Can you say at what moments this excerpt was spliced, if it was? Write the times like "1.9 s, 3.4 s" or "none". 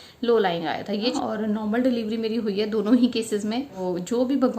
1.1 s, 3.8 s